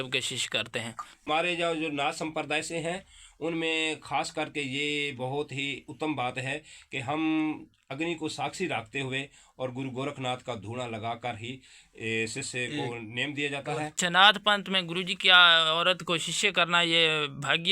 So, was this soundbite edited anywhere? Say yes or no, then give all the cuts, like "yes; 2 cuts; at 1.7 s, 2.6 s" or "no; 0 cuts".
yes; 2 cuts; at 1.1 s, 13.9 s